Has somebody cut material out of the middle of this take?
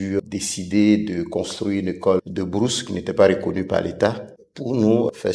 no; 0 cuts

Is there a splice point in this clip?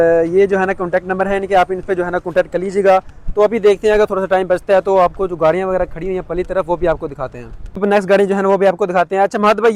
no; 0 cuts

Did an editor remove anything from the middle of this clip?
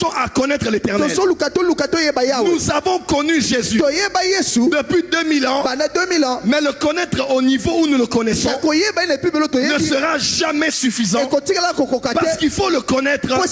no; 0 cuts

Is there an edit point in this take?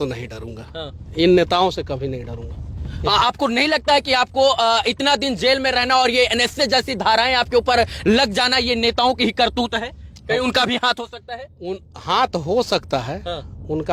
no; 0 cuts

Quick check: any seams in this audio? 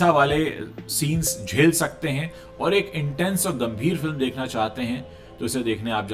no; 0 cuts

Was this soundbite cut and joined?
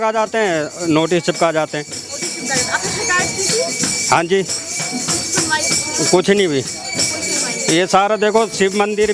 no; 0 cuts

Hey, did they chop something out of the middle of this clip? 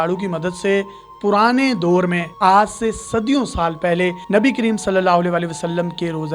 no; 0 cuts

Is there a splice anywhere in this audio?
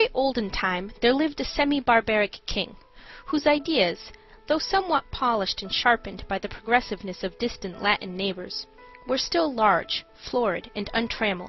yes; 1 cut; at 1.4 s

